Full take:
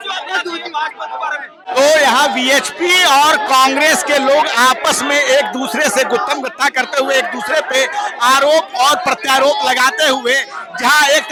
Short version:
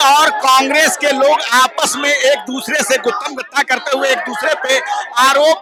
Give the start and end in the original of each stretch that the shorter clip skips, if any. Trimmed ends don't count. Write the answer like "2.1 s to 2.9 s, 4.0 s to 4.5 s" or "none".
none